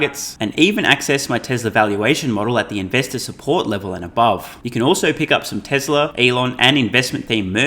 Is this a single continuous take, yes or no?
no